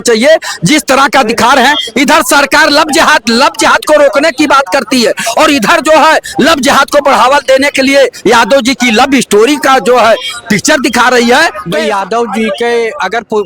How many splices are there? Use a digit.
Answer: 1